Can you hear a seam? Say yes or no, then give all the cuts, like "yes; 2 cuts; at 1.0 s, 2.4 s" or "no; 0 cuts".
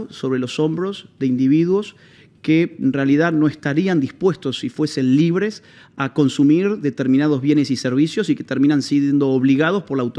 no; 0 cuts